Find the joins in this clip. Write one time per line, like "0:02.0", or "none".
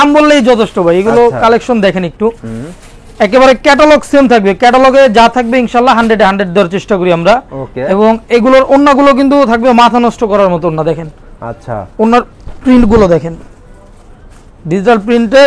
none